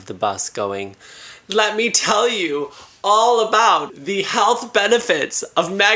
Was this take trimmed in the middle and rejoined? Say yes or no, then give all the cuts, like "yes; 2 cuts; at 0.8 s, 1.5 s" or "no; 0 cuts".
yes; 1 cut; at 4.0 s